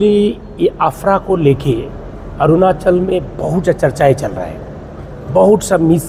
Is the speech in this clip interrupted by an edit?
no; 0 cuts

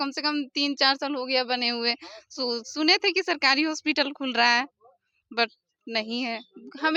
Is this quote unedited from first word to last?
yes; 0 cuts

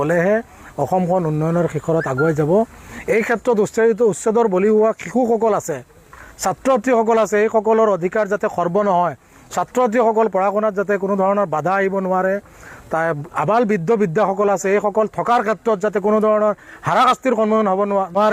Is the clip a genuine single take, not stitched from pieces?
yes; 0 cuts

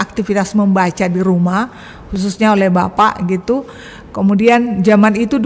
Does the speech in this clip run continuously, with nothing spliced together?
yes; 0 cuts

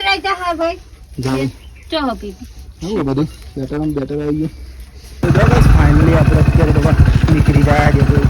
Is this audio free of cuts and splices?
no; 1 cut; at 5.2 s

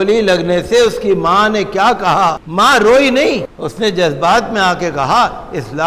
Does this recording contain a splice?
yes; 2 cuts; at 2.4 s, 3.5 s

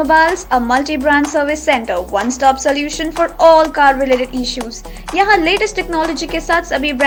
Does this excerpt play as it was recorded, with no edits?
yes; 0 cuts

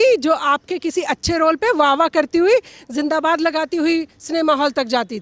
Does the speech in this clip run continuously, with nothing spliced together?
yes; 0 cuts

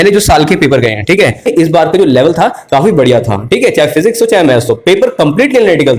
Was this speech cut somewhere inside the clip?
yes; 1 cut; at 1.5 s

